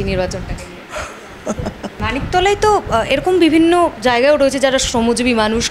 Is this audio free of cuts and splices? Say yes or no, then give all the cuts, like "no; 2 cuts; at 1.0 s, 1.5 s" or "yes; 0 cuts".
no; 1 cut; at 1.9 s